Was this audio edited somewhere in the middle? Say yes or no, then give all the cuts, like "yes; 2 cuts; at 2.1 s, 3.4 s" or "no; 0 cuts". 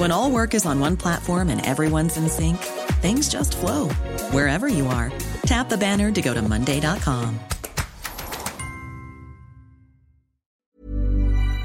yes; 1 cut; at 10.7 s